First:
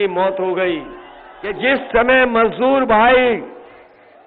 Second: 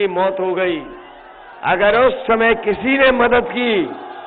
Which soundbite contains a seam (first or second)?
first